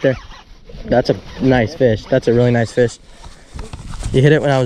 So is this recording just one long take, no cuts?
yes; 0 cuts

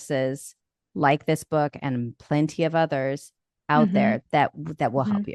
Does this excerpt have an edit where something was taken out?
no; 0 cuts

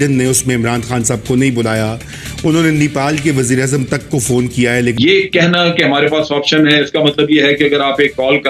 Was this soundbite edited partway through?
yes; 1 cut; at 4.9 s

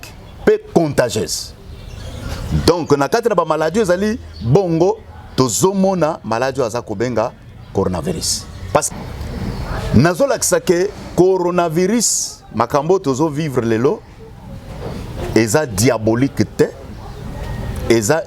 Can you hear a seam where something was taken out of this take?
yes; 1 cut; at 8.9 s

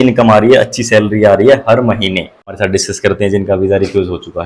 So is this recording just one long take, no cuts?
no; 1 cut; at 2.6 s

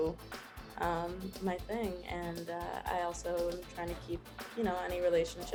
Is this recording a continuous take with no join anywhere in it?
yes; 0 cuts

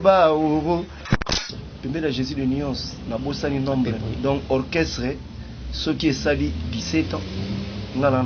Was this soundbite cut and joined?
yes; 1 cut; at 1.3 s

